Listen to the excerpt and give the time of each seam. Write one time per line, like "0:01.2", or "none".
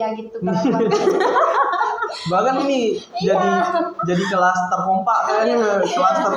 none